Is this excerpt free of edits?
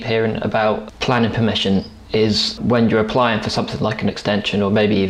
no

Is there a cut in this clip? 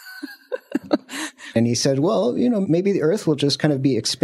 yes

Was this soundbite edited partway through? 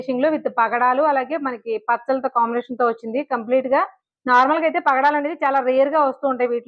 no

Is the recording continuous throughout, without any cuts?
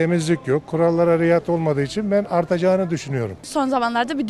no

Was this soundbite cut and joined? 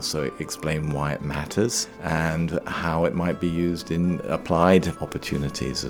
yes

